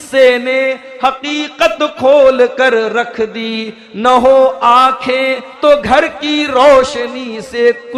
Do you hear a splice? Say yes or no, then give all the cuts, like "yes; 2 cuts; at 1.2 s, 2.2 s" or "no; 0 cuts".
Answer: yes; 1 cut; at 5.5 s